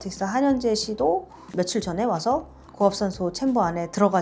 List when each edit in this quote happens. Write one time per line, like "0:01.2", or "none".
none